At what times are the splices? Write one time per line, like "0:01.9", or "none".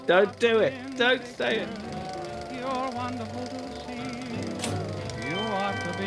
0:02.1